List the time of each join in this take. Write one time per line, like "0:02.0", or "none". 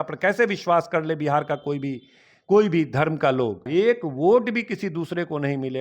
0:03.6